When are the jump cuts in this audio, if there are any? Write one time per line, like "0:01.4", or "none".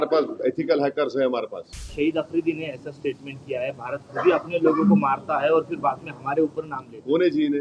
0:01.8